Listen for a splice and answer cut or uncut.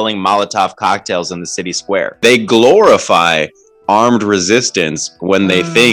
cut